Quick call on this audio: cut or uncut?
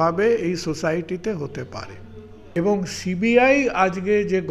cut